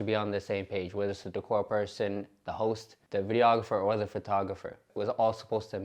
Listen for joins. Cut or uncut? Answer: cut